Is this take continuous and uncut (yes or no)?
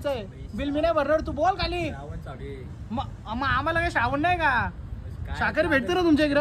yes